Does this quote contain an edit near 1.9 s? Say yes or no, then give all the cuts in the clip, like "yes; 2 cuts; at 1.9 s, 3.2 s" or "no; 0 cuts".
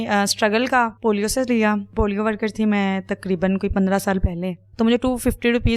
yes; 3 cuts; at 0.9 s, 1.9 s, 4.6 s